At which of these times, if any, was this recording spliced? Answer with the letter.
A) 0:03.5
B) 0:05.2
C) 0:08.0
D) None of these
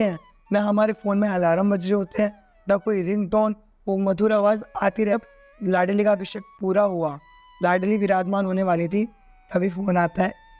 B